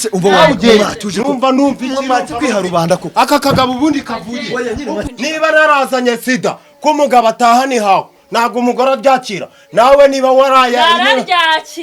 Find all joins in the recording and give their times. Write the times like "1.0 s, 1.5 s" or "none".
5.0 s